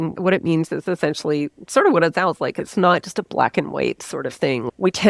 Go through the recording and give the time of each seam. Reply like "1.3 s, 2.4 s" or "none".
none